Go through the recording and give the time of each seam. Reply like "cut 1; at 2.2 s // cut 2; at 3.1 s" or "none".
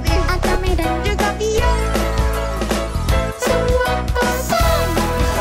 none